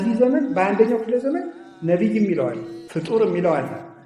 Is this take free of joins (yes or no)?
no